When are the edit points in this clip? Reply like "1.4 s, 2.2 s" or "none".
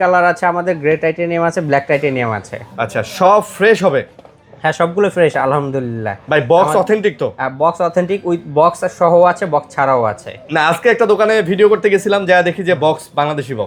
none